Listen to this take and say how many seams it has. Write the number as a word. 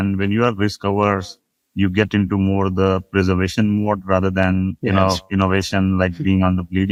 zero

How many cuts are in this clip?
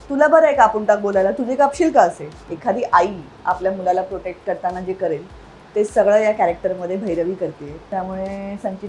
two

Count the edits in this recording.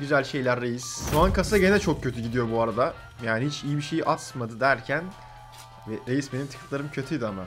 one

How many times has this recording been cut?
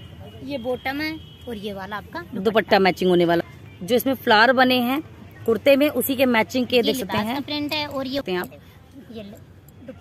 two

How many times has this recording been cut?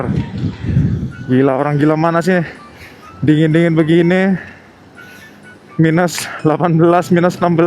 one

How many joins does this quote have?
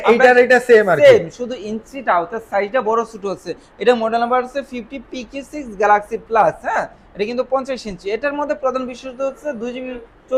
zero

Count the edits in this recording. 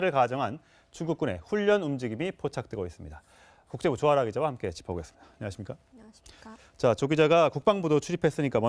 one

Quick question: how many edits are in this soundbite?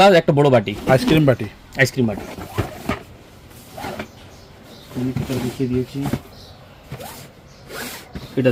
zero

